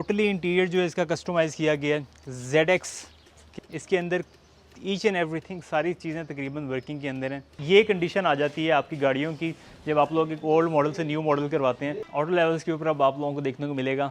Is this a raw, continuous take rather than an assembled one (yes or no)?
no